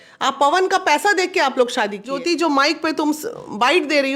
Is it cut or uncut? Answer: cut